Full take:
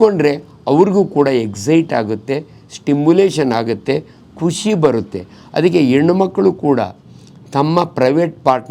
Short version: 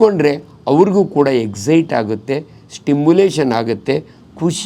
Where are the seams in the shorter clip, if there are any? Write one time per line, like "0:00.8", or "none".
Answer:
none